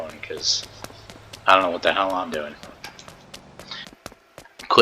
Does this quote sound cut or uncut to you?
cut